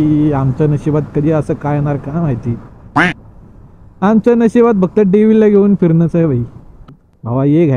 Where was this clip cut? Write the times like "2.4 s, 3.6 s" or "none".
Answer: 6.8 s

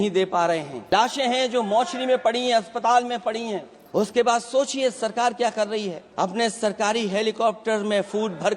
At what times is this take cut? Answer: 0.9 s, 3.7 s, 6.0 s

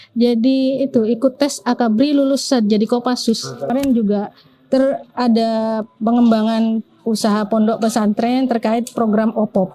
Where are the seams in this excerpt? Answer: 3.7 s

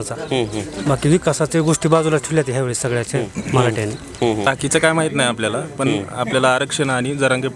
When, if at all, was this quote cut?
4.5 s

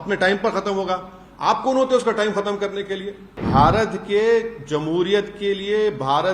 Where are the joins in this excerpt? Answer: 3.4 s

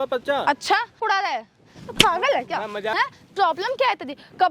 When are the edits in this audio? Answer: 1.0 s, 2.9 s

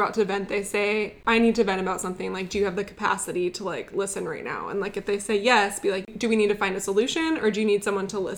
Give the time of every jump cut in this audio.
1.2 s, 6.1 s

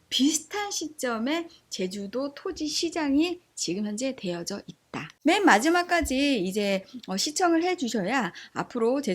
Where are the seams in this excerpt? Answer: 5.1 s

